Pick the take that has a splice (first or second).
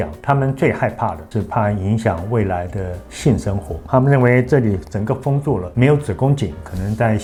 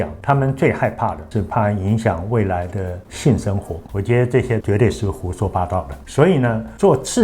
second